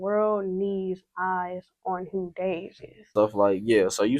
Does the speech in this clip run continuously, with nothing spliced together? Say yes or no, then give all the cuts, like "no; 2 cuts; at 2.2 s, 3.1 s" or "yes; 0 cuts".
no; 1 cut; at 3.1 s